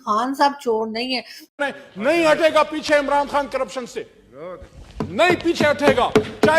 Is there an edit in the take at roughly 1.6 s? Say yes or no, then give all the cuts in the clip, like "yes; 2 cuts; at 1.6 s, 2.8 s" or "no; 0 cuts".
yes; 1 cut; at 1.6 s